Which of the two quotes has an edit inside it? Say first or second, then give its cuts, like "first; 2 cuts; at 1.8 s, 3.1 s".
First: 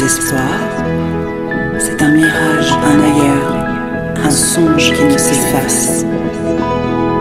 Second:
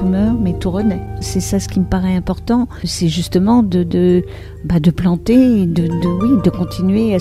second; 2 cuts; at 1.3 s, 2.9 s